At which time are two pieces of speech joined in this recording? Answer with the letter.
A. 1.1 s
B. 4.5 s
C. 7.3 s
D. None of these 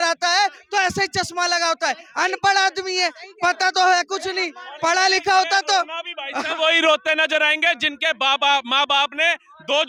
D